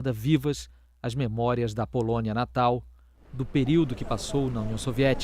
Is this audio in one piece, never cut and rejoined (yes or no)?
no